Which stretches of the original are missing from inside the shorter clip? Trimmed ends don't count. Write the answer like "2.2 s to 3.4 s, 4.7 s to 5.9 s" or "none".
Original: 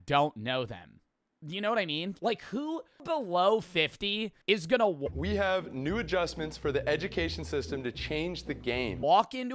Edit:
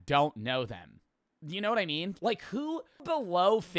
none